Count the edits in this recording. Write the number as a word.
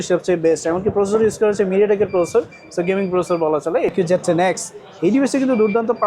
one